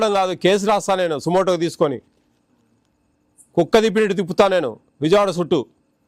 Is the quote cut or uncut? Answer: uncut